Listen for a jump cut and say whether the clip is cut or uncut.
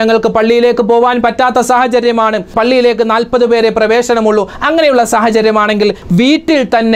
cut